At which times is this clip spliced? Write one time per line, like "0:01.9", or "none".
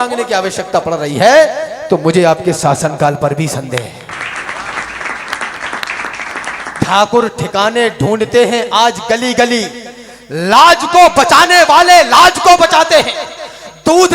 0:06.8